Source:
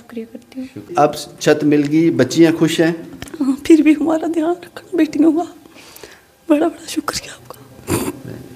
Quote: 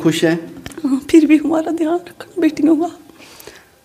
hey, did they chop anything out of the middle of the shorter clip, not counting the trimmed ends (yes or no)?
no